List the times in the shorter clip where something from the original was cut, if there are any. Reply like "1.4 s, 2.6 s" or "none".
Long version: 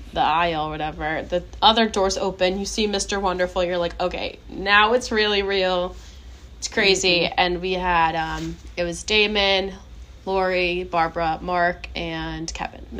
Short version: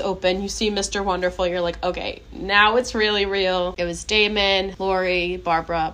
3.7 s, 4.7 s